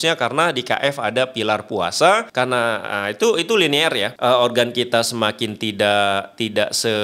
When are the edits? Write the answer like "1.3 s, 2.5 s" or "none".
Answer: 2.3 s, 4.1 s